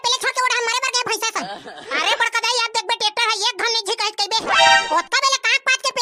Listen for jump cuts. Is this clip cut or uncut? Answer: uncut